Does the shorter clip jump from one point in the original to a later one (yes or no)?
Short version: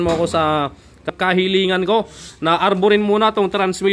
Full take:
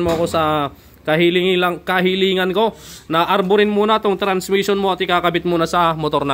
yes